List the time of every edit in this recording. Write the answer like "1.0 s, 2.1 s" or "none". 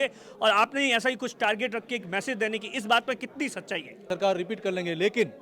4.1 s